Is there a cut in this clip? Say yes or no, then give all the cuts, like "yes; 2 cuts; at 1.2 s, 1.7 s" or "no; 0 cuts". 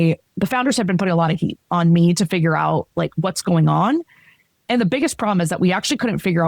yes; 1 cut; at 1.6 s